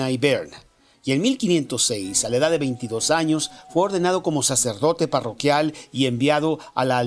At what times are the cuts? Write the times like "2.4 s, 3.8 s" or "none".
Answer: 2.1 s